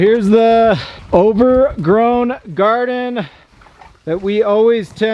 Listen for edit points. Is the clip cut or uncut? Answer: cut